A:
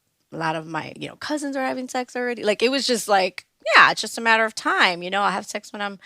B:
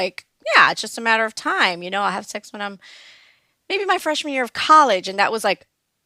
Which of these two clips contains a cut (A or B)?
A